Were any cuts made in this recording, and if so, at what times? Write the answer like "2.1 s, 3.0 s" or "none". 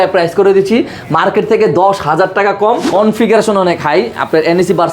2.8 s